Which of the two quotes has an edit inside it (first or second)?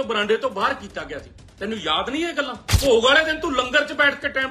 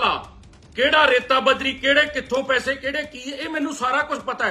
first